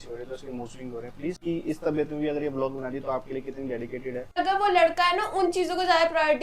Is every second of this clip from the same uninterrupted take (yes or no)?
no